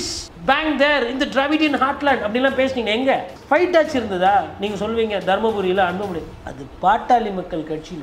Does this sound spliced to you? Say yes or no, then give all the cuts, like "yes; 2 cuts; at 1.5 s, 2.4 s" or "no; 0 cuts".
no; 0 cuts